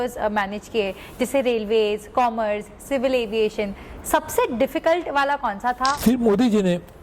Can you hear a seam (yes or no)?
yes